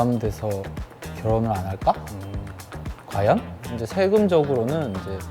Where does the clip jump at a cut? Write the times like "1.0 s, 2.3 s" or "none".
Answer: 3.7 s